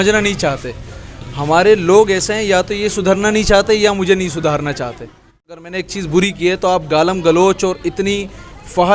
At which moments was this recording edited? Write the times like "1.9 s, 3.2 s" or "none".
5.6 s